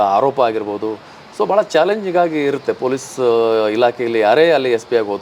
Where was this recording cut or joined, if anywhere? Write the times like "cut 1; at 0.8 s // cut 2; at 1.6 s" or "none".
none